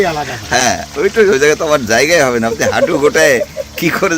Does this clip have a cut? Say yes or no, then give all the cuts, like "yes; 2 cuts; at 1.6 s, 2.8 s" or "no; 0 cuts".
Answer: no; 0 cuts